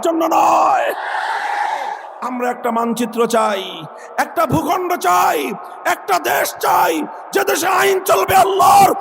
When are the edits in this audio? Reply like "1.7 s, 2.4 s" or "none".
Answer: 2.1 s